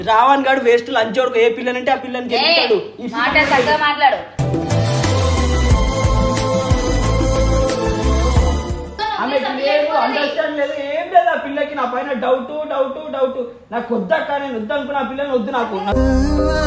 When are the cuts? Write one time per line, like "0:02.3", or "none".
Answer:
0:08.9